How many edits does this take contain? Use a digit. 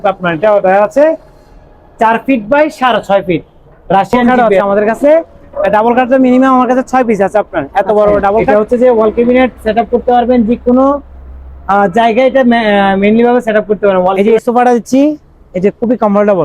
3